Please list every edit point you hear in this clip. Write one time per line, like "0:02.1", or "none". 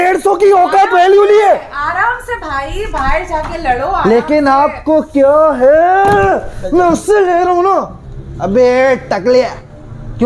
none